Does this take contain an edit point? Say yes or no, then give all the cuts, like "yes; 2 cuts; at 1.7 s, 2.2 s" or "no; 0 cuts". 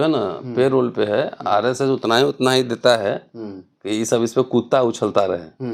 no; 0 cuts